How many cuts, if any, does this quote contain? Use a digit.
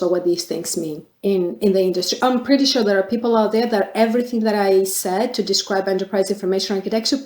1